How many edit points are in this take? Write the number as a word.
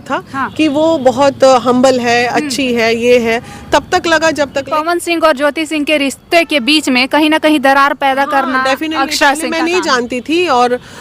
one